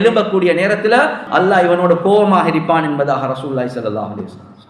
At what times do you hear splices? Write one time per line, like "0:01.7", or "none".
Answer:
0:01.2